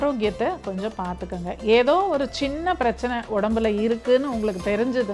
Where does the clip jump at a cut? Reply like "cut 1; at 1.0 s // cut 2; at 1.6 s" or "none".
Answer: none